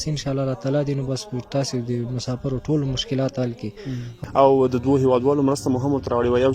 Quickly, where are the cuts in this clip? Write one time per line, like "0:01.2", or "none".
0:04.2